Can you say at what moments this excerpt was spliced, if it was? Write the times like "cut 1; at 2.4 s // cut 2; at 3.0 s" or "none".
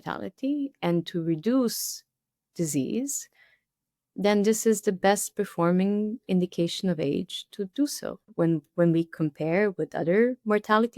cut 1; at 8.2 s